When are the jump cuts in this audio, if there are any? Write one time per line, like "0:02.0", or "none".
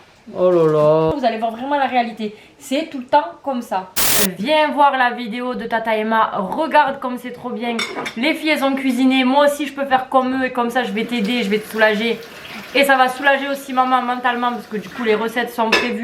0:01.1
0:04.1